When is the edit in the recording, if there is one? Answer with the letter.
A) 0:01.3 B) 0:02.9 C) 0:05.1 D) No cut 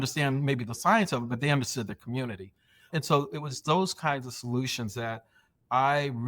B